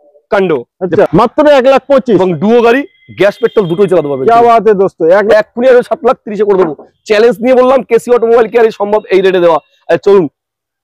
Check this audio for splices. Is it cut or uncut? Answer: cut